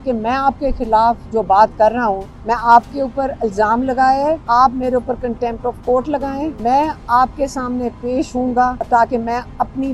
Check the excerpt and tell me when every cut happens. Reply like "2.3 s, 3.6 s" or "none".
2.3 s, 4.4 s, 6.6 s, 8.8 s